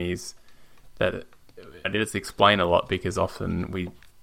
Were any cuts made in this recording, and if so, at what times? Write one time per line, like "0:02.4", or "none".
0:01.9